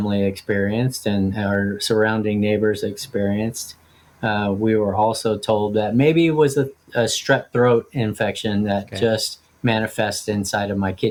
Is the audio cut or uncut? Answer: uncut